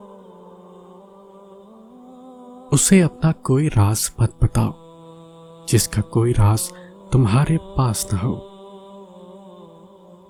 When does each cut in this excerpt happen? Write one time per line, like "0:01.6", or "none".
none